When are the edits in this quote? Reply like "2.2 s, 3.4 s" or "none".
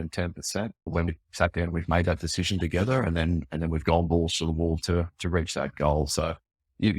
0.9 s

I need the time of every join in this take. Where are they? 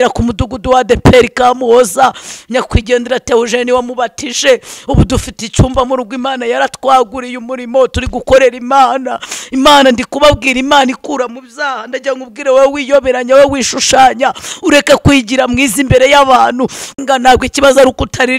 17.0 s

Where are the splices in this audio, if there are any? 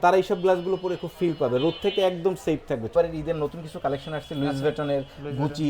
2.9 s

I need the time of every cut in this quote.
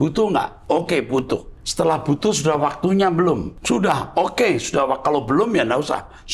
1.6 s, 3.5 s

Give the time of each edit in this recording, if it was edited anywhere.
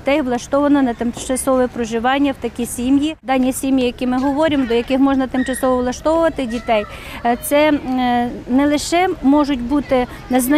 none

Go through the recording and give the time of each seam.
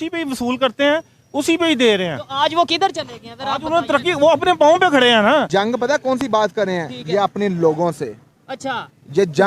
5.5 s

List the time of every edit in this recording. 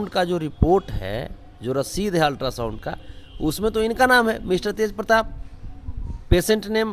none

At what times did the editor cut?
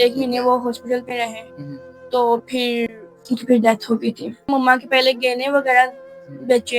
4.5 s

